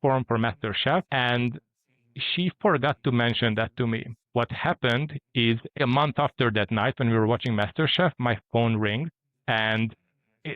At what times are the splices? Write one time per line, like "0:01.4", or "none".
0:01.1
0:04.2
0:05.8